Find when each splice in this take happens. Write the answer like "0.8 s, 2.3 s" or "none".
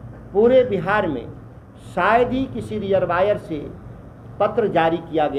none